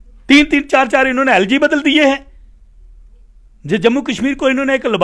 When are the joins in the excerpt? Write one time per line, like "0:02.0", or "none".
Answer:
none